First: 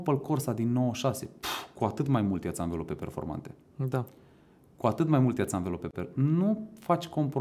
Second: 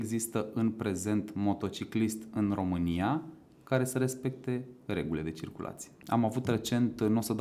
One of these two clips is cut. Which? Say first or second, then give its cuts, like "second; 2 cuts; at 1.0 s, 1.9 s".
second; 1 cut; at 6.0 s